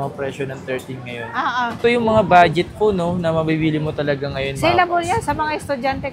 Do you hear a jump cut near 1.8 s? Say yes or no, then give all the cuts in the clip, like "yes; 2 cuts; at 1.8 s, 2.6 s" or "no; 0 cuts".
yes; 1 cut; at 1.8 s